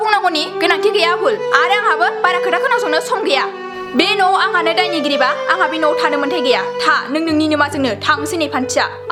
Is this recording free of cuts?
yes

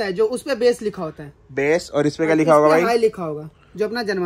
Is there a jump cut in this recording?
no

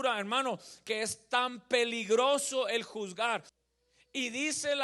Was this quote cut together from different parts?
yes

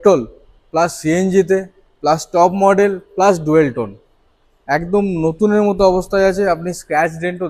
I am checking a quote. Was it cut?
no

